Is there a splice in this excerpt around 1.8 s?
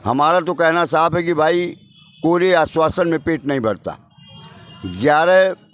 no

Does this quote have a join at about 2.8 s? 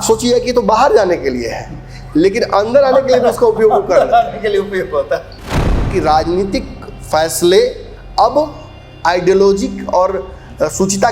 no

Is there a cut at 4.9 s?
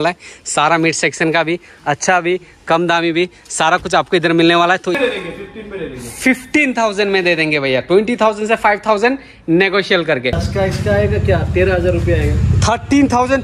yes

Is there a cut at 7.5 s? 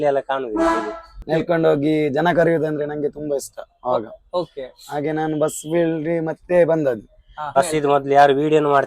yes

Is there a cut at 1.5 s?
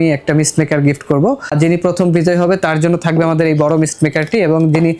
yes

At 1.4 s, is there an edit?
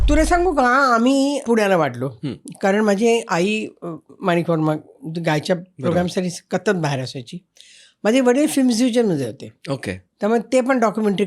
yes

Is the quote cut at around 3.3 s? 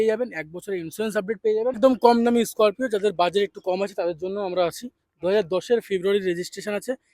no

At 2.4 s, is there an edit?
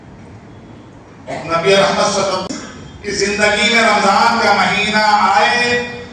yes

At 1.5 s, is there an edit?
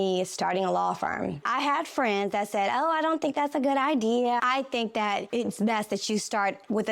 yes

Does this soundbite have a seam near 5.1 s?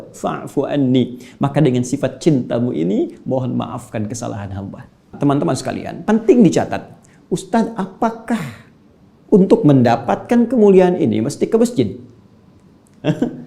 yes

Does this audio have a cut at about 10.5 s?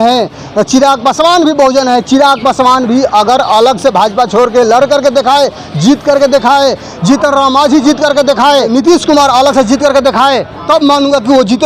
yes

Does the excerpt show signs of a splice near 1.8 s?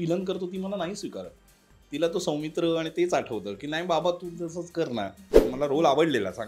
no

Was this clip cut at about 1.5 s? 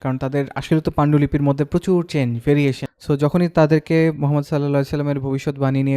no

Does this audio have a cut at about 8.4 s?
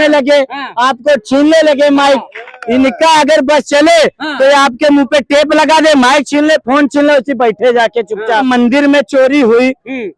yes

